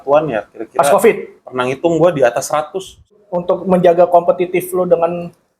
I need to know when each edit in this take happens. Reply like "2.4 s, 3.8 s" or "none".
3.1 s